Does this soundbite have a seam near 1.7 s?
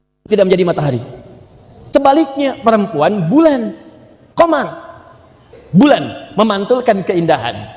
yes; 2 cuts; at 1.7 s, 5.5 s

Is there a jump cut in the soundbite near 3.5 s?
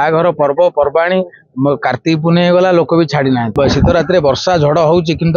yes; 1 cut; at 3.5 s

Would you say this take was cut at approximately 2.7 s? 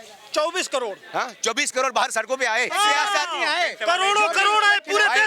yes; 1 cut; at 2.7 s

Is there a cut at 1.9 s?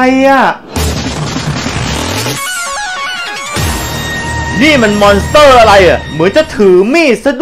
no; 0 cuts

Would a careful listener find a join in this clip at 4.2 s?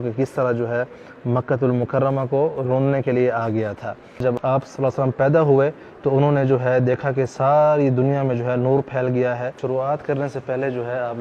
yes; 2 cuts; at 4.2 s, 9.5 s

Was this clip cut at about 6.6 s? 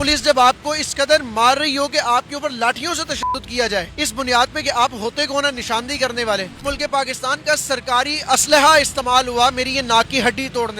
yes; 2 cuts; at 3.9 s, 6.6 s

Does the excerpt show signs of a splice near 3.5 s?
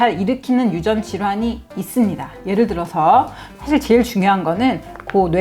yes; 1 cut; at 3.5 s

